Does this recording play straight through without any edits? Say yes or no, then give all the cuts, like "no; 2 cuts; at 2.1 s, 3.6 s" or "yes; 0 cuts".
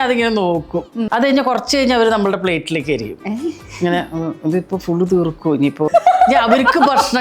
no; 2 cuts; at 1.0 s, 5.9 s